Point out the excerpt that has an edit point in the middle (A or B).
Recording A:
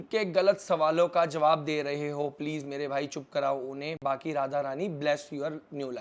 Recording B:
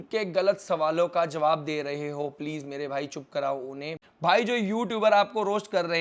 B